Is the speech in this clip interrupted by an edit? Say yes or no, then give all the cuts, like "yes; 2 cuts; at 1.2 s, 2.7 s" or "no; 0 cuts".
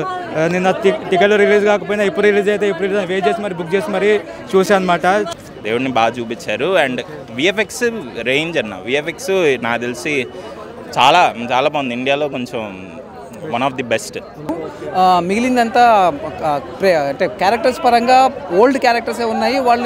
yes; 2 cuts; at 5.3 s, 14.5 s